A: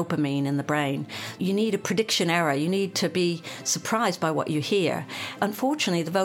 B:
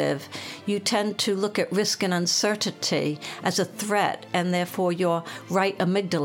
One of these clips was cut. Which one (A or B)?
A